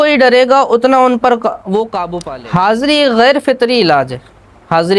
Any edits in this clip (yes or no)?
yes